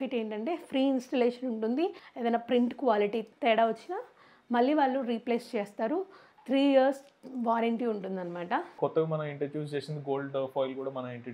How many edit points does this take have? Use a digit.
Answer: 3